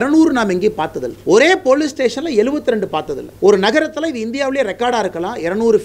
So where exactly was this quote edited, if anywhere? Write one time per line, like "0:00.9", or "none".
0:01.1
0:03.2